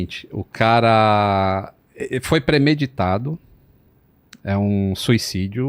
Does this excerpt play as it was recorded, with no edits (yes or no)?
yes